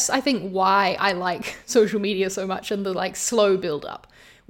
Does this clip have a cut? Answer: no; 0 cuts

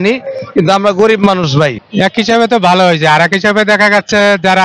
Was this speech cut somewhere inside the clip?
yes; 1 cut; at 1.8 s

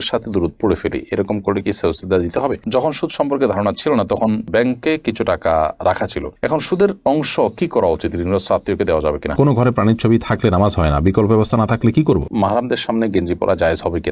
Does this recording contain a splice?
yes; 3 cuts; at 2.6 s, 9.3 s, 12.3 s

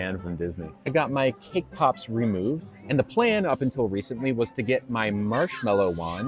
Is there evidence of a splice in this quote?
yes; 1 cut; at 0.9 s

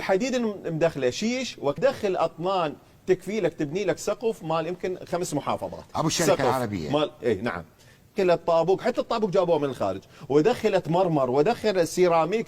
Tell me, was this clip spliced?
yes; 2 cuts; at 1.8 s, 8.1 s

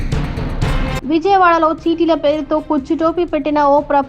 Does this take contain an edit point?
no; 0 cuts

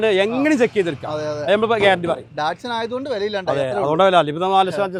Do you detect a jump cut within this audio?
no; 0 cuts

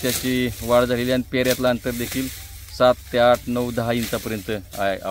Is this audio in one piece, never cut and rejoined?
yes; 0 cuts

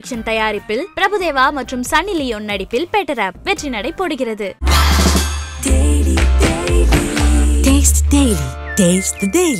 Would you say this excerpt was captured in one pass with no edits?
yes; 0 cuts

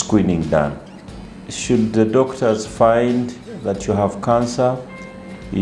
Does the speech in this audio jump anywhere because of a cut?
yes; 1 cut; at 1.1 s

